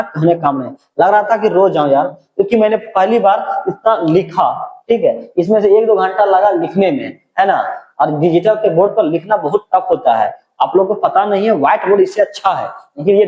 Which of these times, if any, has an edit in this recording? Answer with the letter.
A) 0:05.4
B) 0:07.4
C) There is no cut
C